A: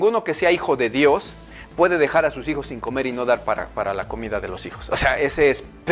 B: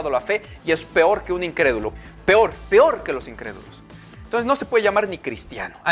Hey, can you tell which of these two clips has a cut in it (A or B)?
B